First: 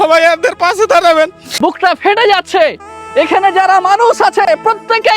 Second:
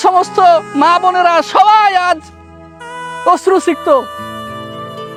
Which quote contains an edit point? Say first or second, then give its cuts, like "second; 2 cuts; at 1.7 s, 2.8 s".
first; 1 cut; at 1.4 s